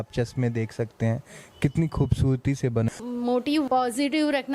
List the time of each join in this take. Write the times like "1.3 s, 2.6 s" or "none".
2.9 s